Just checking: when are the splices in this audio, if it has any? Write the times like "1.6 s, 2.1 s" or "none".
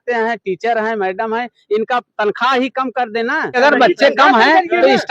3.6 s